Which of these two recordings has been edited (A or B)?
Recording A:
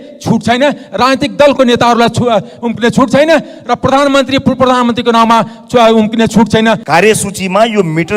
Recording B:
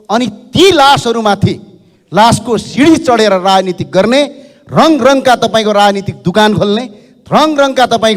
A